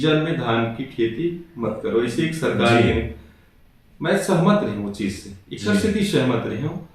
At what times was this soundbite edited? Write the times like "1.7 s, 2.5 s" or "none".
none

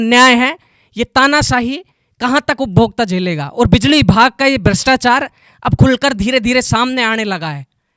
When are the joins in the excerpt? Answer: none

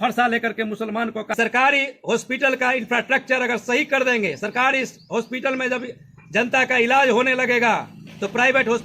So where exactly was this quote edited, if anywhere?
1.3 s

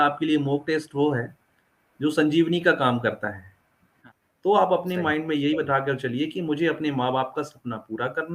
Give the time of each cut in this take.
4.0 s

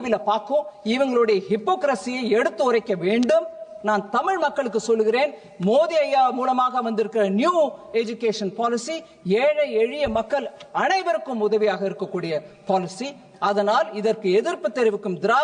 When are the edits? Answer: none

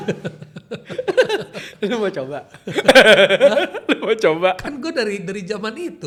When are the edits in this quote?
none

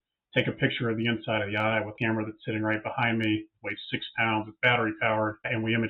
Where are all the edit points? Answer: 1.9 s

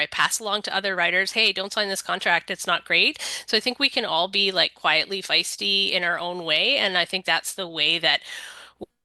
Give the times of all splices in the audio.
none

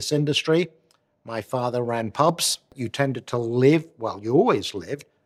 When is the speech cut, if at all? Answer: 2.8 s

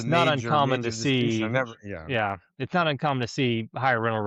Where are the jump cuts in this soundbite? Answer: none

